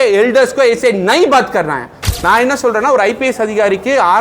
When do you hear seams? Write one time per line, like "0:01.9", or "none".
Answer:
0:02.0